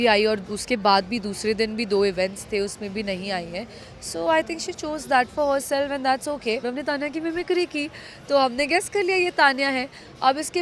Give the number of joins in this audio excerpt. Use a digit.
1